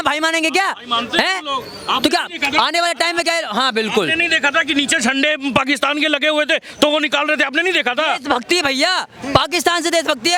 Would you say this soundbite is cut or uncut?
uncut